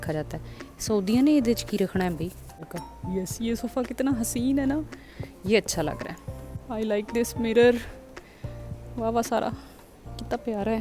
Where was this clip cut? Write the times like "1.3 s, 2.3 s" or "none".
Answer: 2.7 s, 6.5 s